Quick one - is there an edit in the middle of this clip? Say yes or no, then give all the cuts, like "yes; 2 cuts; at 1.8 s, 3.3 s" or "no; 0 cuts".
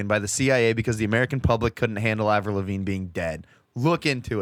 no; 0 cuts